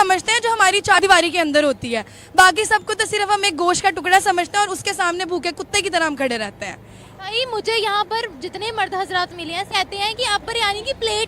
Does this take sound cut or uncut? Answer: cut